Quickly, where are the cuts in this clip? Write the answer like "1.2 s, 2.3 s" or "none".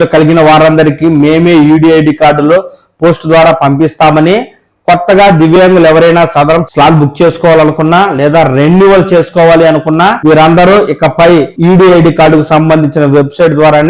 6.7 s, 10.2 s, 11.5 s